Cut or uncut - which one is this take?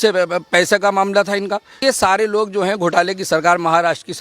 cut